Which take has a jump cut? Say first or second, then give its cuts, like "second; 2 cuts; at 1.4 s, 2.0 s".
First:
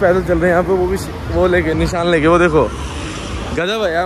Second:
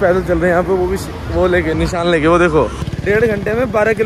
second; 1 cut; at 2.9 s